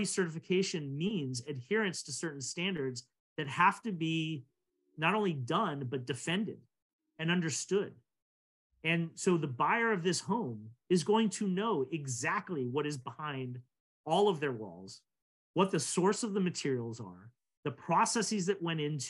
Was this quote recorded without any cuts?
yes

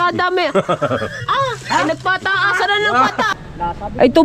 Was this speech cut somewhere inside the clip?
yes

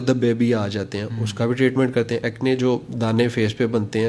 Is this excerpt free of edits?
no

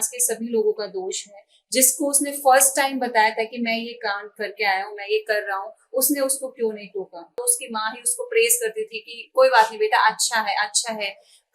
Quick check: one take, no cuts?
no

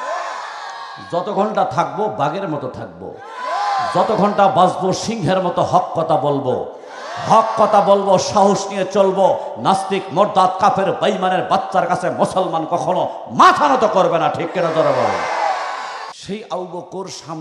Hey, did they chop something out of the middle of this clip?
yes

